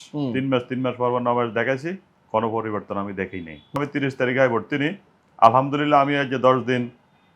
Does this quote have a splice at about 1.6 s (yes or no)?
no